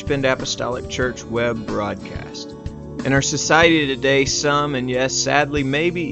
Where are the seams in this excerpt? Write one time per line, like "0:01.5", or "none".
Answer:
none